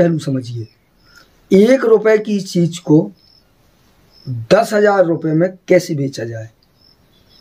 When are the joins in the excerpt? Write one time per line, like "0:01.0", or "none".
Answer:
none